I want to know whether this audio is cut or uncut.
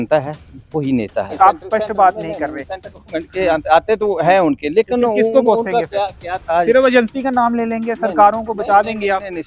cut